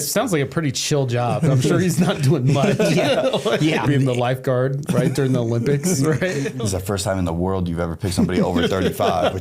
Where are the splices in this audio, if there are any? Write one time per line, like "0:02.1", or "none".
0:03.8
0:06.5

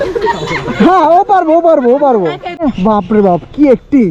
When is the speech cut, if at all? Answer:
0:02.5

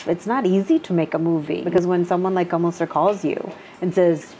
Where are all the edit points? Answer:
0:01.7

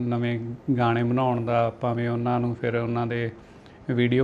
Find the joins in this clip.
none

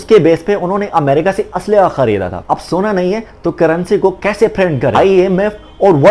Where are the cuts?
0:04.9

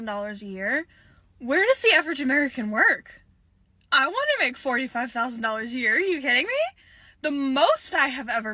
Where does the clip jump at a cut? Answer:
none

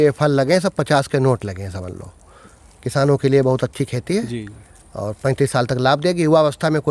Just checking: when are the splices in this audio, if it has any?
none

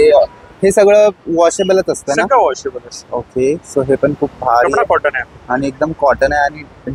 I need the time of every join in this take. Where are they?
none

